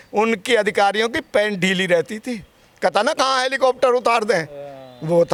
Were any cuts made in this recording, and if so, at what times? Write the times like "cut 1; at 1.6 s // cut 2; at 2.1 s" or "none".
none